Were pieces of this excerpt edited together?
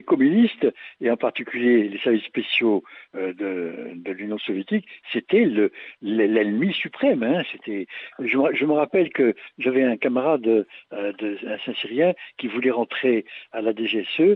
no; 0 cuts

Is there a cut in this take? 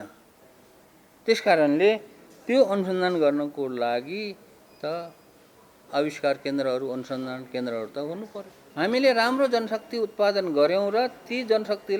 yes; 1 cut; at 8.6 s

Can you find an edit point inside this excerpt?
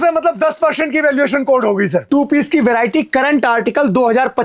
yes; 1 cut; at 2.1 s

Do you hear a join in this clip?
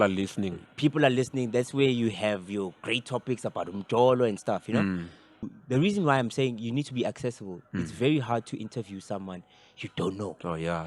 yes; 1 cut; at 5.3 s

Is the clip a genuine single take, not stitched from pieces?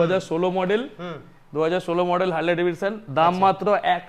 yes; 0 cuts

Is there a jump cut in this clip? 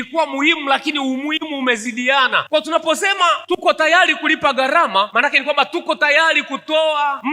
no; 0 cuts

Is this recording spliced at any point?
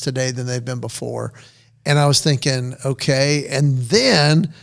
no; 0 cuts

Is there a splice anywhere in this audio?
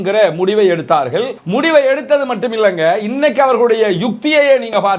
yes; 1 cut; at 1.4 s

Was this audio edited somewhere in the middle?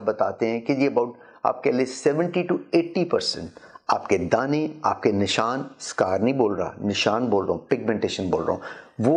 no; 0 cuts

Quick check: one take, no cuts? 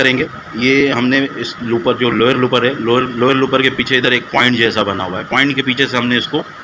yes; 0 cuts

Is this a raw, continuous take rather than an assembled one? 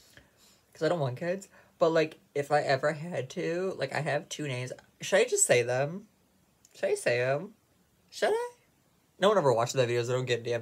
yes; 0 cuts

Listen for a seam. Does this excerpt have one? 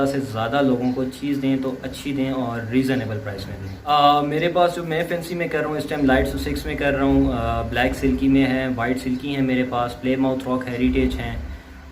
yes; 1 cut; at 3.7 s

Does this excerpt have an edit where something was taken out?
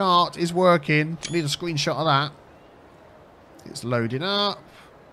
no; 0 cuts

